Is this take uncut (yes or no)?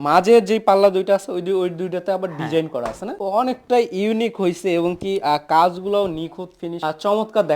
no